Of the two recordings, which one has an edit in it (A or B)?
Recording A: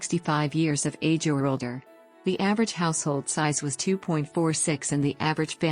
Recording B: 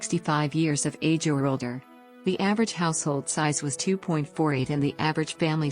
B